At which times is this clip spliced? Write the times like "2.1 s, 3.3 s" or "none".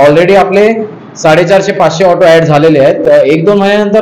3.0 s